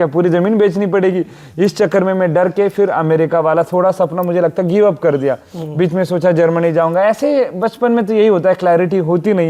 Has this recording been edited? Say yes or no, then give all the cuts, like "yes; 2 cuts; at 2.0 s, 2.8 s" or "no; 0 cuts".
no; 0 cuts